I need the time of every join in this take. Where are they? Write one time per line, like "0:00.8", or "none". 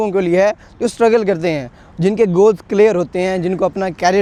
none